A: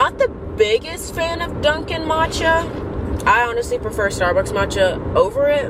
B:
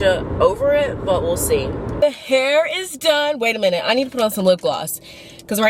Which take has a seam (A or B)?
B